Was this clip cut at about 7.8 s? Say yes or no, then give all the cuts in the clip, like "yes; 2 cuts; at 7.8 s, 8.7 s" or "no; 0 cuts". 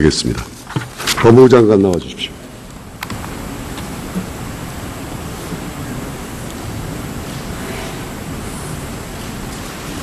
yes; 1 cut; at 7.8 s